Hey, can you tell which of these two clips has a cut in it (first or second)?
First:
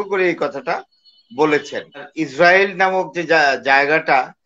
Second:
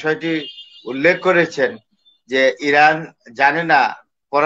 first